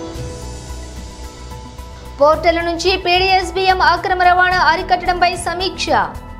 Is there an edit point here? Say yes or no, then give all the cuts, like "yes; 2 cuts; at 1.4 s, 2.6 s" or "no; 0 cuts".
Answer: no; 0 cuts